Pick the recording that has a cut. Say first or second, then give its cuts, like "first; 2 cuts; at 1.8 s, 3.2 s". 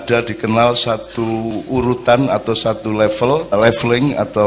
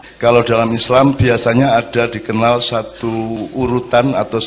first; 1 cut; at 3.5 s